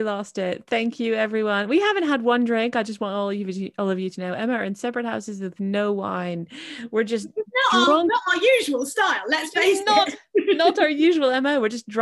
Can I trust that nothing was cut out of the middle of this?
yes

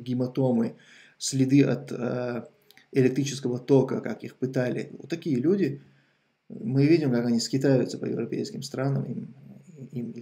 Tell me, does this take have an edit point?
no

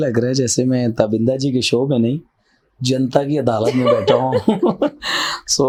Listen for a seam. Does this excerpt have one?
no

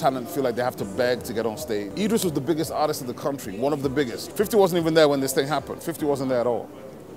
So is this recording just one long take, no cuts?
no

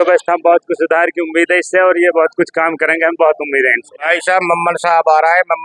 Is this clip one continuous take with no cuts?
no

